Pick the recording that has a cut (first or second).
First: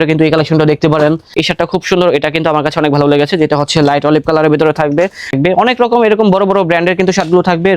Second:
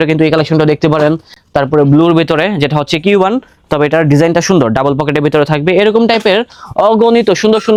first